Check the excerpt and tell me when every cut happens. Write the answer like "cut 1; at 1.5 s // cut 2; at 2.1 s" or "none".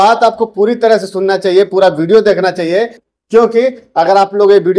none